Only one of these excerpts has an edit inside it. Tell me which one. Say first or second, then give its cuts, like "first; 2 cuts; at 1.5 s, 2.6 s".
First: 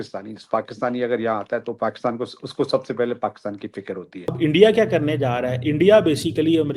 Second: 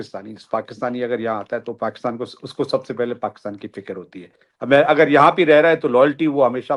first; 1 cut; at 4.3 s